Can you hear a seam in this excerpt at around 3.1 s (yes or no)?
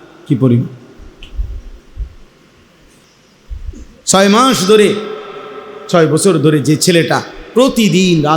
yes